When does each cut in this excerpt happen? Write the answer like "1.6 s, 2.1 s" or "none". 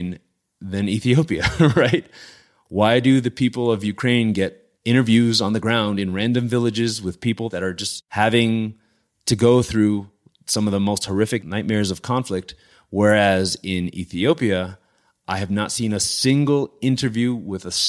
none